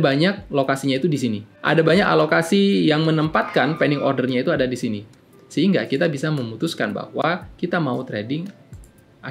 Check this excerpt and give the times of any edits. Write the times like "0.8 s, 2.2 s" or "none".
1.5 s